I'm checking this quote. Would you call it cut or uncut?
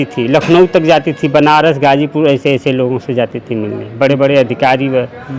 uncut